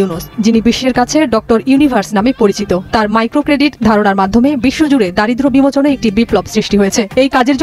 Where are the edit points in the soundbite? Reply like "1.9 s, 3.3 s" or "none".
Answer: none